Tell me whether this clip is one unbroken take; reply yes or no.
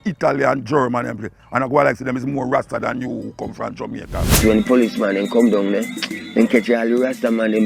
no